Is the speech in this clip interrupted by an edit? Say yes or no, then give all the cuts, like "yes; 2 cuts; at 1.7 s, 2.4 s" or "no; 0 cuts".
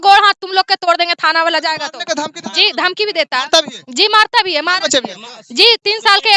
no; 0 cuts